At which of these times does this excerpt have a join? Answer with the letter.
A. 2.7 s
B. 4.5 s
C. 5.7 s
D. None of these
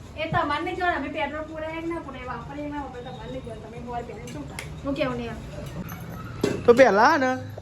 C